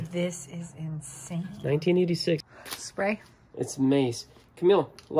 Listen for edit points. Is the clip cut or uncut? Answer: cut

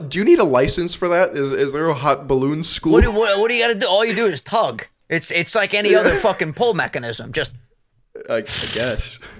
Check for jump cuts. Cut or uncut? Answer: uncut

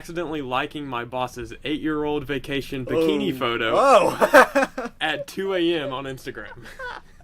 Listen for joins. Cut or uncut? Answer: uncut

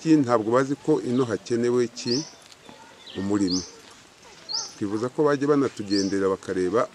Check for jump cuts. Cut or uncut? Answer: uncut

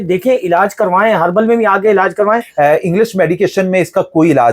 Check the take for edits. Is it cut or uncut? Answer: cut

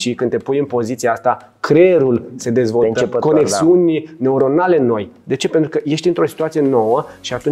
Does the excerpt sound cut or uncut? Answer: uncut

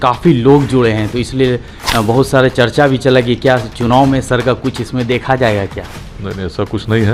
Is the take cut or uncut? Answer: uncut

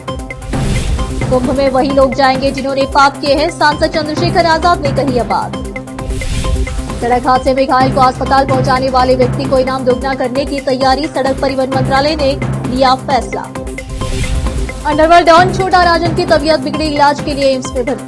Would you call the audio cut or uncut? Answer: uncut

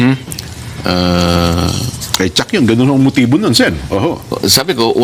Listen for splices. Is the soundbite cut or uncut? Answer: cut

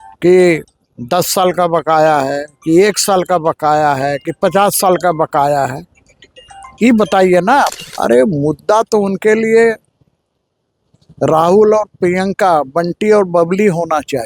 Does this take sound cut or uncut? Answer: cut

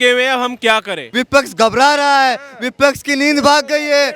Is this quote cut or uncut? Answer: cut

